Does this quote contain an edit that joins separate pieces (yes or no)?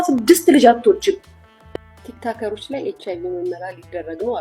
yes